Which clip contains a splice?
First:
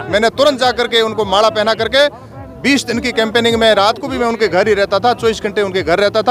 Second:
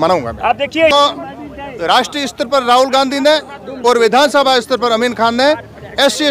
second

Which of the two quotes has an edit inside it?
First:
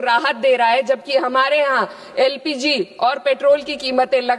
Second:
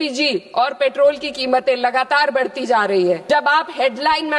second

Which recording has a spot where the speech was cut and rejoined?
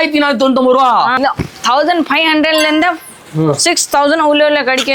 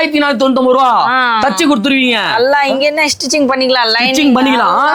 first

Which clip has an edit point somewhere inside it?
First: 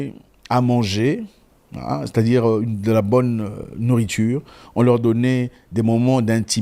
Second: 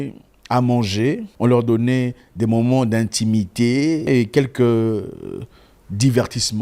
second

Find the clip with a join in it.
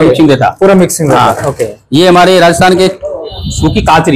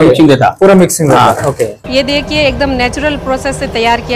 second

